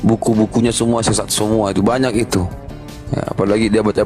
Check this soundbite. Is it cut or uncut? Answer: uncut